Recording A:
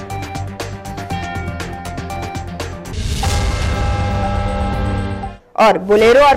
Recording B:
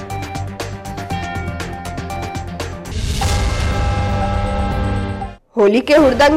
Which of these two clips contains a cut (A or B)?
A